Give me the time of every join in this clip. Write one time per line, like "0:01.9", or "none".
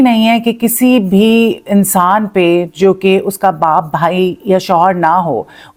none